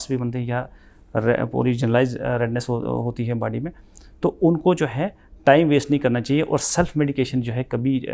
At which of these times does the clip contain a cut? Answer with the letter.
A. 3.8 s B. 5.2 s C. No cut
C